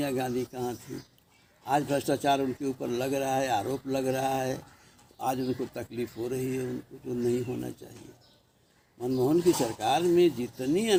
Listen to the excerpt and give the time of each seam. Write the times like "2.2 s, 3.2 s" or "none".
none